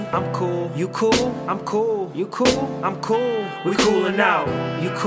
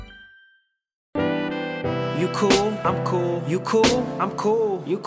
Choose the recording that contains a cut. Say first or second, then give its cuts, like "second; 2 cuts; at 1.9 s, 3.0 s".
second; 1 cut; at 1.2 s